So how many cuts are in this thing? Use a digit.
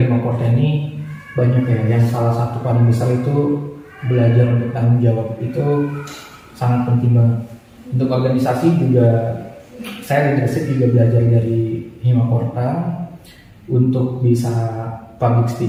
0